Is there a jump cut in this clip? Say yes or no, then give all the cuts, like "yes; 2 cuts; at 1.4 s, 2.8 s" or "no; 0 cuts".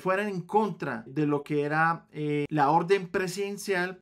no; 0 cuts